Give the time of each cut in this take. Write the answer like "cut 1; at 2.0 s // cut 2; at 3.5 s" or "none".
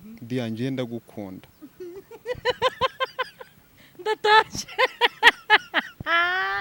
none